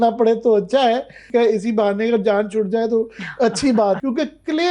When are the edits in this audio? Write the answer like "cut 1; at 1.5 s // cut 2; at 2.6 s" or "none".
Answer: cut 1; at 1.3 s // cut 2; at 4.0 s